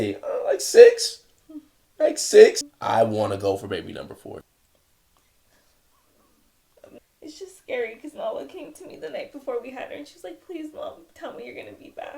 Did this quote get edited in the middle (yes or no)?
yes